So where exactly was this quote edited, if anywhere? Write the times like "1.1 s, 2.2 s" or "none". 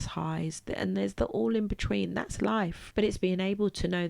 2.8 s